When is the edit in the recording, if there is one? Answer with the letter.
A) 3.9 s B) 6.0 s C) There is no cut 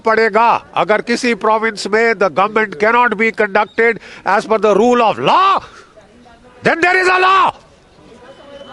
C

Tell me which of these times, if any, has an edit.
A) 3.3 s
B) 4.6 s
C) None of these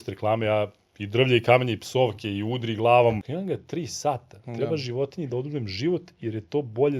A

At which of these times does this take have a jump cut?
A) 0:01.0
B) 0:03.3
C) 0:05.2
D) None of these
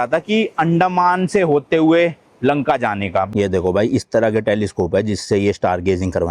B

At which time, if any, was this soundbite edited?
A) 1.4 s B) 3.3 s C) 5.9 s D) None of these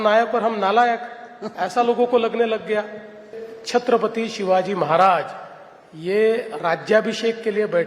B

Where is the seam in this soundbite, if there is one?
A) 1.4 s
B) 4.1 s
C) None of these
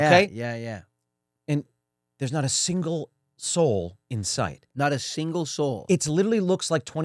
C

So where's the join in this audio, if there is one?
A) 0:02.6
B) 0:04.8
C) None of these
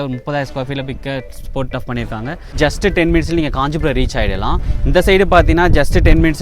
A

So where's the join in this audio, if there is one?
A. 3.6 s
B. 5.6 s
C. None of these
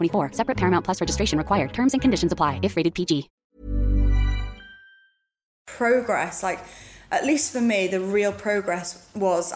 B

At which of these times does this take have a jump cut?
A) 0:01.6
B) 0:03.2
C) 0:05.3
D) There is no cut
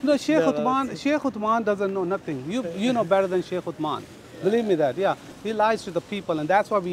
C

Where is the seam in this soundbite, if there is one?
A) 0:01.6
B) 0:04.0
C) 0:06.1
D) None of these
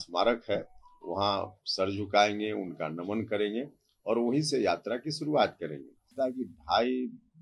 C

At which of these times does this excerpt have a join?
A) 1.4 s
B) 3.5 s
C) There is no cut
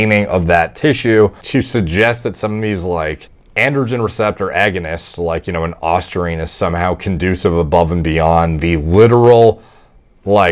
A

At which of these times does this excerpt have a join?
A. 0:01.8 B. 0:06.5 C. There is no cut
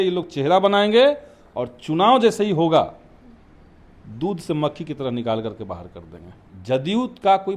B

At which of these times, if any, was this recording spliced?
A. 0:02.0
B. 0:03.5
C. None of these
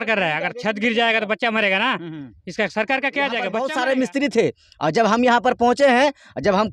B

